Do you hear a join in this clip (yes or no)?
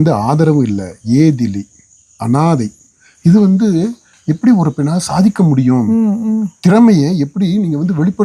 yes